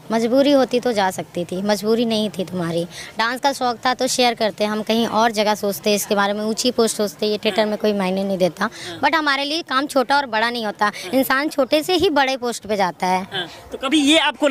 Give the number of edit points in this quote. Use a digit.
0